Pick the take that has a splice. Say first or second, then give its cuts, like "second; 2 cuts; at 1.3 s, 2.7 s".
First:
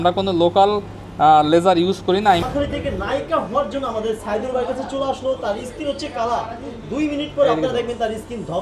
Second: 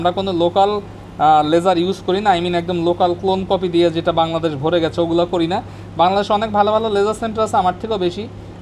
first; 1 cut; at 2.4 s